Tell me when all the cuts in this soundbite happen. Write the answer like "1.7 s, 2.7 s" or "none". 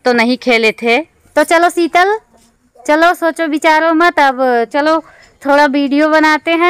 1.2 s

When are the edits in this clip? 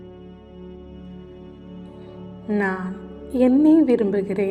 2.5 s

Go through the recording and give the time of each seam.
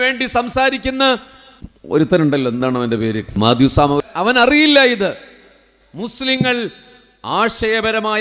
3.4 s, 4.0 s

